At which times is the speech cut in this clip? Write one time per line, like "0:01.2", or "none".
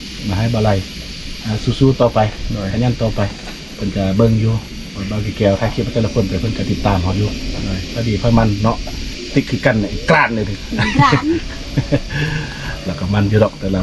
none